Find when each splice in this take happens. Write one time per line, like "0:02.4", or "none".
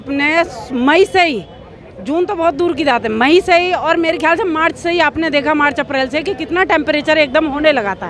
none